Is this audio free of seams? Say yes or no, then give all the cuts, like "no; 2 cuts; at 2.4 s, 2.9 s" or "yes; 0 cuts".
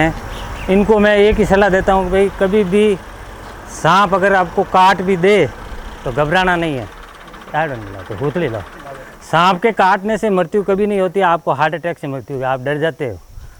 yes; 0 cuts